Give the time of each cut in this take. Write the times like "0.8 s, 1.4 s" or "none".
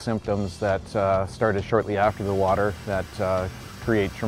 none